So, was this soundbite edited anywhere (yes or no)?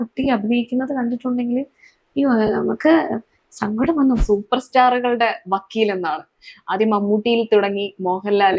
yes